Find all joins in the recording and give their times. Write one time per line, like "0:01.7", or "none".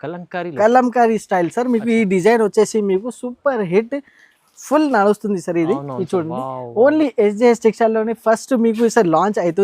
none